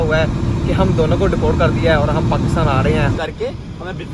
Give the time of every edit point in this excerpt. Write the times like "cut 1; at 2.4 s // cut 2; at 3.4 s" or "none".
cut 1; at 3.2 s